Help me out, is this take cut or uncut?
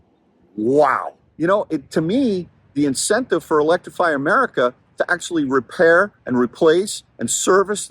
cut